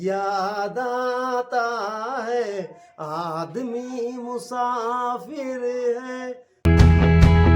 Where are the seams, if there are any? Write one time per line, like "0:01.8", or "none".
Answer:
0:06.6